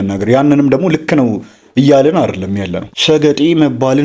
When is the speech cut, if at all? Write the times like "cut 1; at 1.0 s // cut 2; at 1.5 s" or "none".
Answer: cut 1; at 2.8 s